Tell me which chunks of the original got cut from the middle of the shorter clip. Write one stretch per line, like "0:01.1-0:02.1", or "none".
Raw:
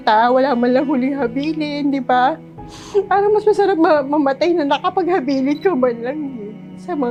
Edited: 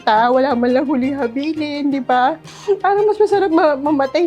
0:02.5-0:02.8